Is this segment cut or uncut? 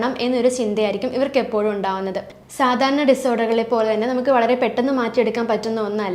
cut